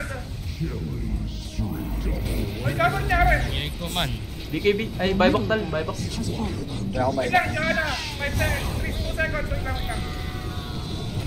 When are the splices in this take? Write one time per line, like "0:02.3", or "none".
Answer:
none